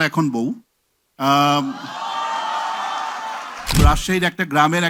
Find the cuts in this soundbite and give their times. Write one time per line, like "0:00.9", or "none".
0:03.7